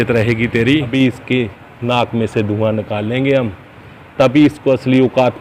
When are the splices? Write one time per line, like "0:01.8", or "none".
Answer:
0:00.9